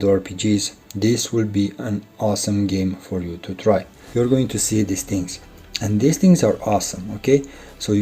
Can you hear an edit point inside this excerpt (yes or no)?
yes